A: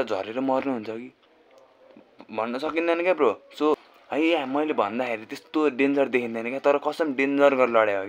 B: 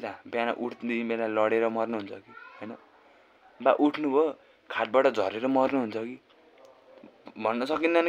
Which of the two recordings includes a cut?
A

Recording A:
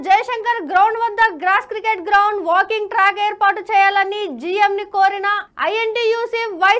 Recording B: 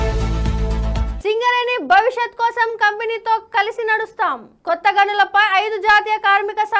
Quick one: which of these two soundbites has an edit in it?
B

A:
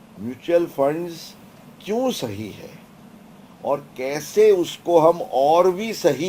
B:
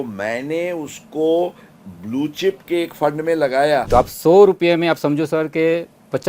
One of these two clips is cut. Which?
B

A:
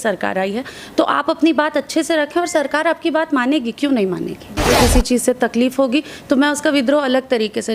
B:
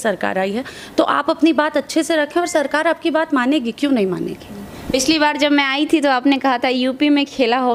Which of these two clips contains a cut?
A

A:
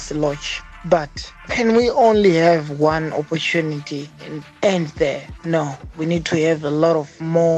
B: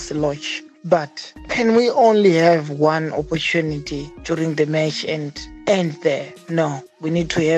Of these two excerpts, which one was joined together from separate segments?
A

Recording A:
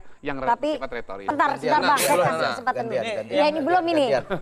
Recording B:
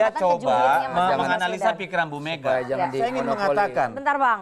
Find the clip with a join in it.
A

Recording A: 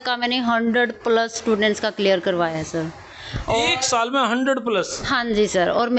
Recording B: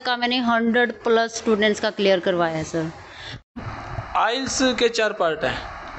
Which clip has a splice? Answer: B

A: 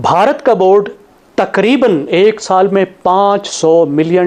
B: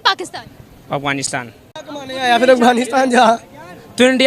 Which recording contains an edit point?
B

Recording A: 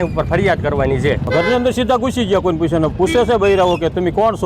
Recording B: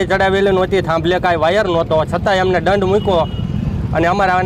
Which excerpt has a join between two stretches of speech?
A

